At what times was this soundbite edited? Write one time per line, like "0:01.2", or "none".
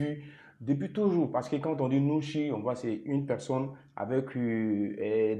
none